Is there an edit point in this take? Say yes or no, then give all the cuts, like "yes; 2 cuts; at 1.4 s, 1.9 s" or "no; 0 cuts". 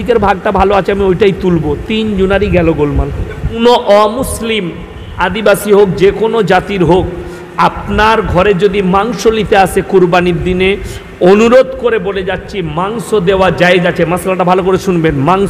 yes; 1 cut; at 3.6 s